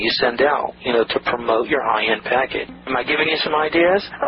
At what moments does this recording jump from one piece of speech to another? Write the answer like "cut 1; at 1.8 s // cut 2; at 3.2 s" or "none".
cut 1; at 2.8 s